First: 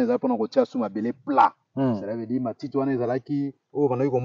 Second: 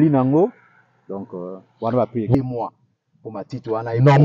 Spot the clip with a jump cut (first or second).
second